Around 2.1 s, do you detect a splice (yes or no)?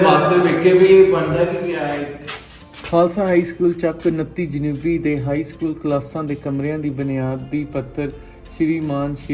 yes